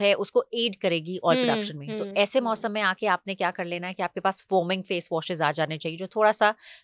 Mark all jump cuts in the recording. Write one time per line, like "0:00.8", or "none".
none